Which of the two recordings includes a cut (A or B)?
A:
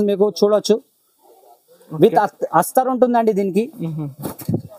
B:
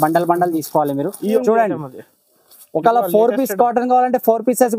B